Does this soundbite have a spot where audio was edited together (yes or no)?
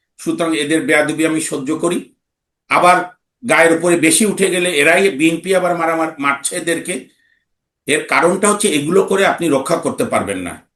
no